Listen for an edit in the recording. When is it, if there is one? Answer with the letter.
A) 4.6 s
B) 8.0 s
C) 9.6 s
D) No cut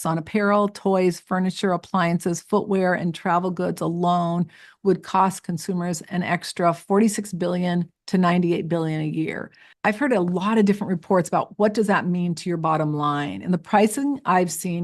C